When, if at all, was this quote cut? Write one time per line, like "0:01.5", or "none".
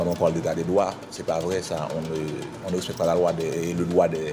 none